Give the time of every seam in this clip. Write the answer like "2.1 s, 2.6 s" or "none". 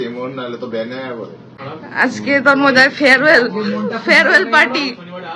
1.5 s